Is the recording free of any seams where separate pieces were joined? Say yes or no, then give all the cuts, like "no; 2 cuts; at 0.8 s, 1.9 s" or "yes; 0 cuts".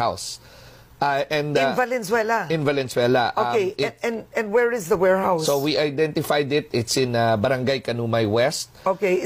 yes; 0 cuts